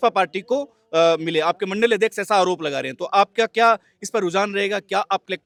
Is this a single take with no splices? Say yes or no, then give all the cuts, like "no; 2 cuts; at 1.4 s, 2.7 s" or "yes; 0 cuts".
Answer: yes; 0 cuts